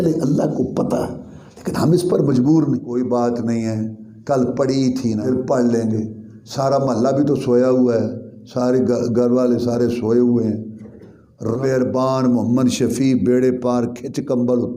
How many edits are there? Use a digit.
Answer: 3